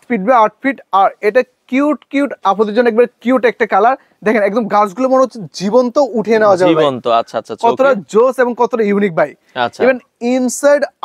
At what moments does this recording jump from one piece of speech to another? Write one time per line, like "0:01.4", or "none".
none